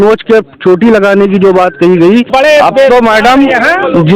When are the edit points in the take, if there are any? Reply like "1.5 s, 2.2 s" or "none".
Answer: 2.3 s

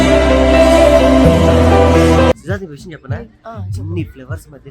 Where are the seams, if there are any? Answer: 2.4 s

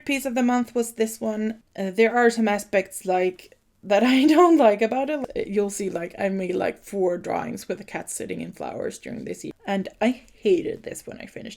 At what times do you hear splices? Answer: 1.6 s, 5.2 s, 9.5 s

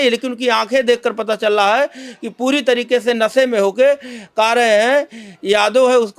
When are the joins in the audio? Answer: none

